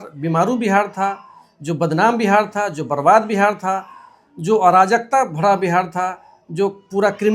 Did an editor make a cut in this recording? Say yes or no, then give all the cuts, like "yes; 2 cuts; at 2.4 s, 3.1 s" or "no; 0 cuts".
no; 0 cuts